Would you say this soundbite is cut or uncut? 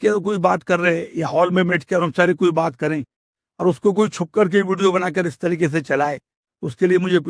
uncut